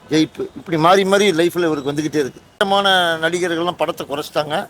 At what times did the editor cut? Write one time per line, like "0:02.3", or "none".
0:02.6